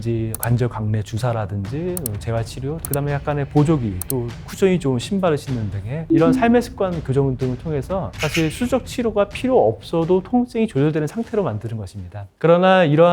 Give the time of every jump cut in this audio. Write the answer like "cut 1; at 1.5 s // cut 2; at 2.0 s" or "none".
cut 1; at 2.8 s